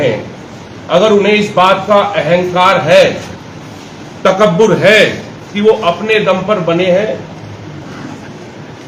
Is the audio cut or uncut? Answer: uncut